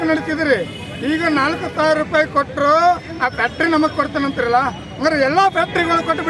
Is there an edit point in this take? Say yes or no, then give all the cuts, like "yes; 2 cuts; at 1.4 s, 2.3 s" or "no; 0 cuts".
no; 0 cuts